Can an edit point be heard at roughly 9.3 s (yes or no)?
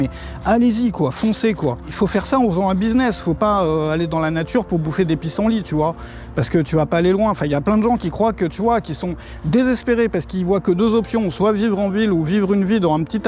no